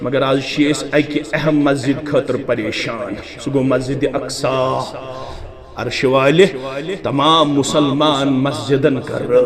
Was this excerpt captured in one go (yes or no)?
yes